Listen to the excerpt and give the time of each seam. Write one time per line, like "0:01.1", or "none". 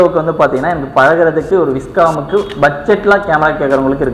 none